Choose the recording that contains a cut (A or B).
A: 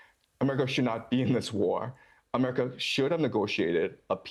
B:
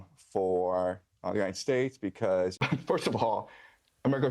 B